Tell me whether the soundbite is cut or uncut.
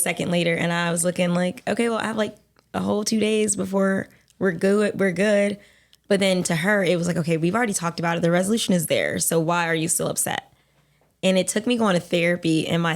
cut